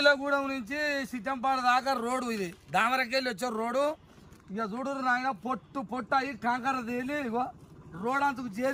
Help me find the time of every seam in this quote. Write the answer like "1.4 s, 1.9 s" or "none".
none